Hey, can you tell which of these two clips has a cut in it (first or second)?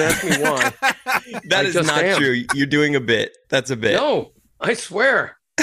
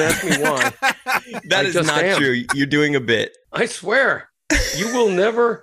second